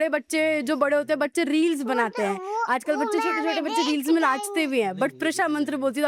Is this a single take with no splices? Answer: yes; 0 cuts

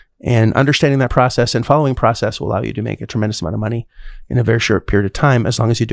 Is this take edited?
no; 0 cuts

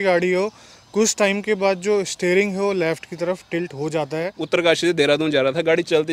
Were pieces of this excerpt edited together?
yes; 1 cut; at 4.4 s

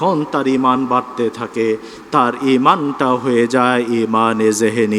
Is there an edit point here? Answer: no; 0 cuts

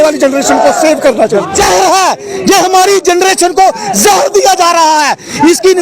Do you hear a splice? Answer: yes; 1 cut; at 1.5 s

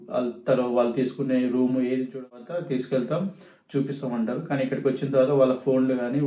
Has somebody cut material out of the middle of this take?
yes; 1 cut; at 2.4 s

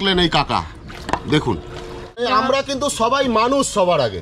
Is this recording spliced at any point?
yes; 1 cut; at 2.2 s

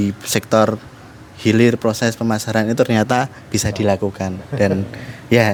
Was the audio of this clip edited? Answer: no; 0 cuts

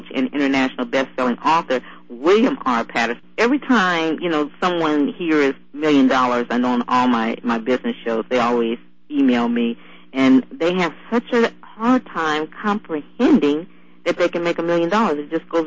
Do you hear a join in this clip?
yes; 1 cut; at 3.2 s

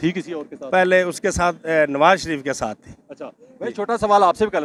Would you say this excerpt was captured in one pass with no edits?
yes; 0 cuts

